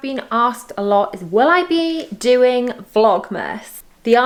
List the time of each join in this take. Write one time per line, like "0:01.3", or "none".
none